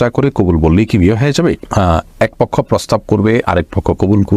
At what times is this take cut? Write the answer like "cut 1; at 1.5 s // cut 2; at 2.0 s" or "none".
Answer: none